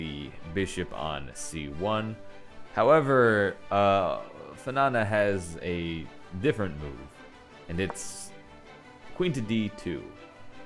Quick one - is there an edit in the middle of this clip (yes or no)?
no